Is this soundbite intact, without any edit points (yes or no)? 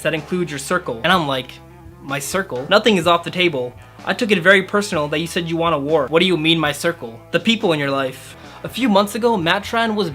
no